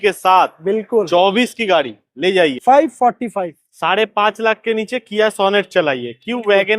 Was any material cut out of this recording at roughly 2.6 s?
yes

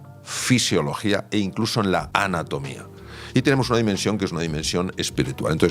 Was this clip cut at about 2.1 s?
yes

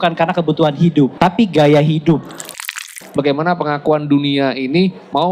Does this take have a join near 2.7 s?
yes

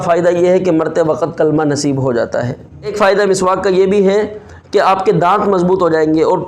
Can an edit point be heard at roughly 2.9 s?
yes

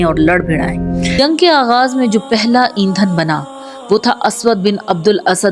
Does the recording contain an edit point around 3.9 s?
no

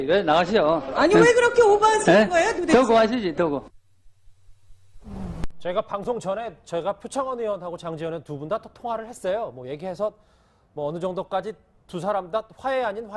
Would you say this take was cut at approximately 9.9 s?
no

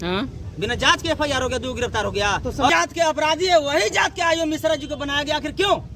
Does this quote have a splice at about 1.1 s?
no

